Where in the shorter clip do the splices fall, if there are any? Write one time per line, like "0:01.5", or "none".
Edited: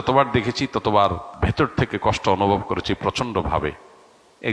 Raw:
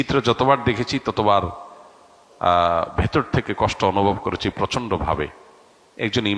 0:01.4